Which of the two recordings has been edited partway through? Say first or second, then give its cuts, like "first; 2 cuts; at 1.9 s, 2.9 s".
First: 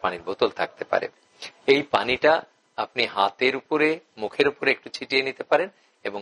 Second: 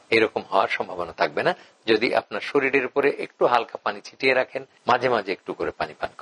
second; 1 cut; at 4.7 s